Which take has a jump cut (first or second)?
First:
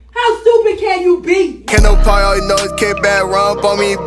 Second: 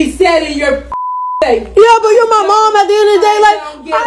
first